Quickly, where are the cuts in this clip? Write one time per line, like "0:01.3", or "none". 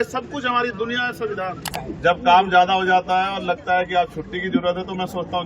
0:01.7

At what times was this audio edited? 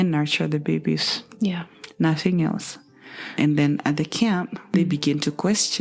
0:04.7

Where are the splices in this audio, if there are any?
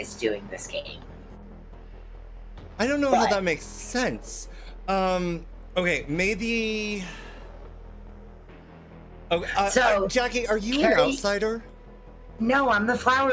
0:07.5
0:09.1

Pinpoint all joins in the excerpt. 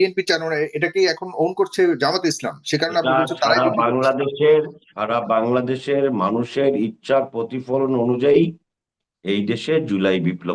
none

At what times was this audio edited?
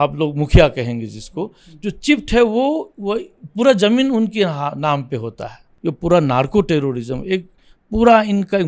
0:05.7

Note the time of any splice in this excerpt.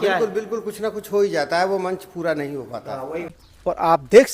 0:03.3

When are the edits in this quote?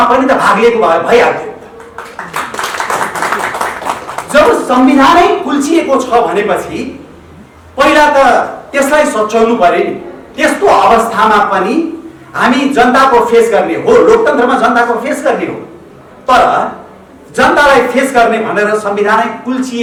none

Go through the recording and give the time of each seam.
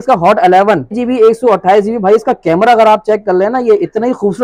0:01.0

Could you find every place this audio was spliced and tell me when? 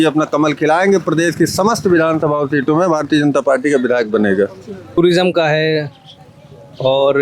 0:05.0

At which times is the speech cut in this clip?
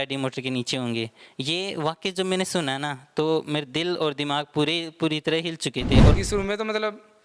0:06.1

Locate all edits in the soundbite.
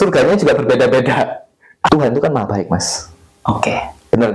0:01.9

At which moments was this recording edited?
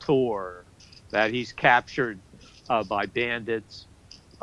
none

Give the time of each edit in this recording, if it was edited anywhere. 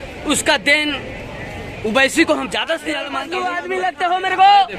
0:03.2

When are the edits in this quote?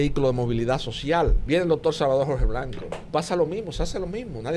0:01.4
0:02.9

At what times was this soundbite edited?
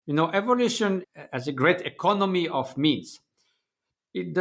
0:01.0

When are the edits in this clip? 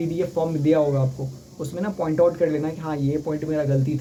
none

